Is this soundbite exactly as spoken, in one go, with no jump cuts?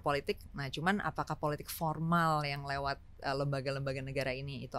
yes; 0 cuts

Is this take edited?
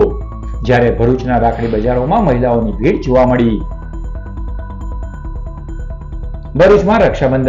no; 0 cuts

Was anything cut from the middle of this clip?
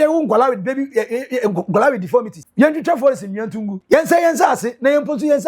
yes; 2 cuts; at 2.4 s, 3.7 s

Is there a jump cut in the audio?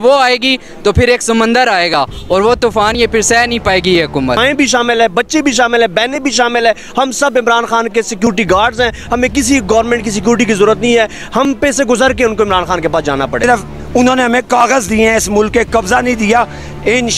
yes; 2 cuts; at 4.4 s, 13.4 s

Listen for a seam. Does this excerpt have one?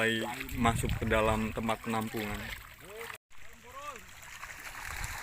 yes; 1 cut; at 3.2 s

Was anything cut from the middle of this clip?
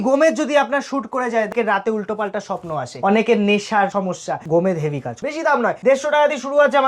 yes; 4 cuts; at 1.5 s, 2.9 s, 4.0 s, 5.5 s

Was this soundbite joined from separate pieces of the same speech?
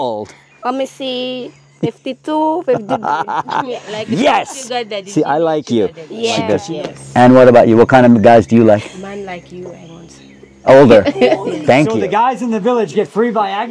yes; 2 cuts; at 6.6 s, 11.9 s

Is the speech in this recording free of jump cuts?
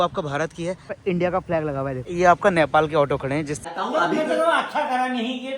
no; 3 cuts; at 0.9 s, 2.1 s, 3.6 s

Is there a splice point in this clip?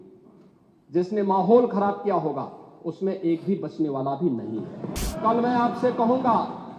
yes; 1 cut; at 5.0 s

